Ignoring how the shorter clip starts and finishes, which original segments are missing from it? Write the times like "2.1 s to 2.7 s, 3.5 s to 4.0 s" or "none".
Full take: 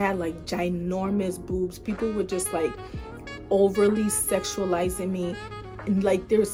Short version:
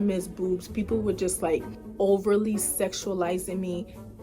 2.9 s to 3.3 s